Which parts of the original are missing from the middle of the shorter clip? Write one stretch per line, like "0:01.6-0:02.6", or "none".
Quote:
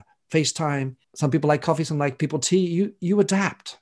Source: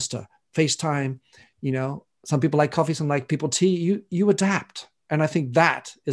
0:01.3-0:02.1